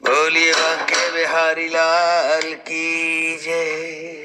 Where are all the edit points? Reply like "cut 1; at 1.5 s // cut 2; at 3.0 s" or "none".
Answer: none